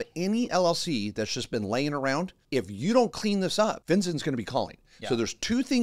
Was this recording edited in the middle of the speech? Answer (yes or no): yes